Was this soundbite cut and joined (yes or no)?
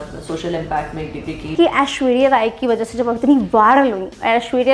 yes